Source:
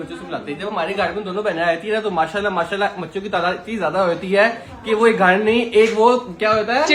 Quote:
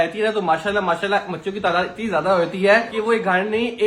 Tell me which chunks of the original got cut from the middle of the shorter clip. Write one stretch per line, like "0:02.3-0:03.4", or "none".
0:04.6-0:04.8